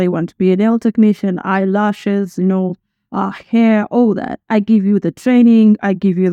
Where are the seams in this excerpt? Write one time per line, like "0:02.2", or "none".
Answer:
none